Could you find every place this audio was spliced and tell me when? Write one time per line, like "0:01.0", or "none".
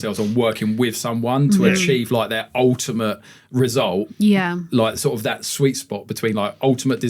none